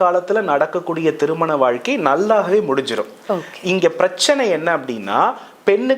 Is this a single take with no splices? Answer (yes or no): yes